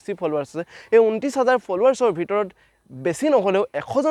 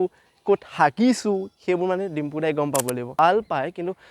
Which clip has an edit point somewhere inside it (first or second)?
second